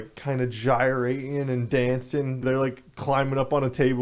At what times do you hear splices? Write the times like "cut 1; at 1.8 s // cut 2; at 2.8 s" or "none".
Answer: cut 1; at 2.4 s